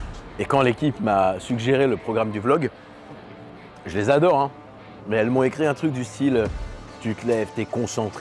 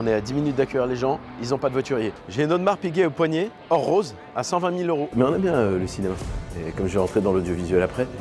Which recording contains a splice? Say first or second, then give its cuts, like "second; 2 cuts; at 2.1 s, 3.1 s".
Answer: second; 2 cuts; at 2.2 s, 5.1 s